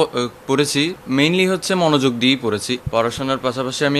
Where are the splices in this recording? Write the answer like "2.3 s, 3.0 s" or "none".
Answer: 1.0 s, 2.8 s